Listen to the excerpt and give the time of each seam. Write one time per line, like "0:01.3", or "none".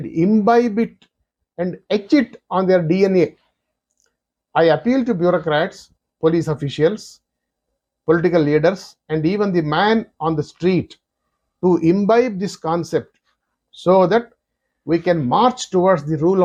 none